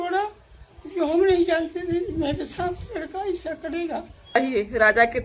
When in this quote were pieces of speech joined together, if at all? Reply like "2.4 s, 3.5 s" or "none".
4.4 s

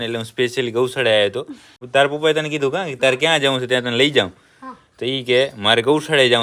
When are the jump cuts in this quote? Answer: 1.8 s

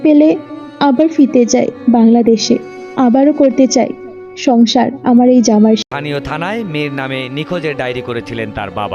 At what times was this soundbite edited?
5.8 s

